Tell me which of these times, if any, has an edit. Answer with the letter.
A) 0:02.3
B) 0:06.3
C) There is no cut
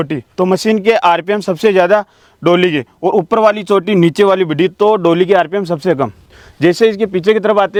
C